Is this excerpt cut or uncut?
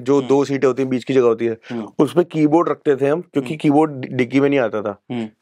uncut